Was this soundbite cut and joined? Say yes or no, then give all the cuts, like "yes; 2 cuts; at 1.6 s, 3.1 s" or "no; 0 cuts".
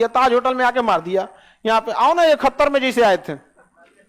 no; 0 cuts